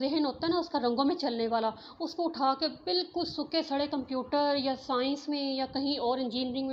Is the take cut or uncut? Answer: uncut